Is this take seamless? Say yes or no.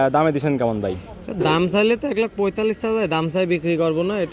yes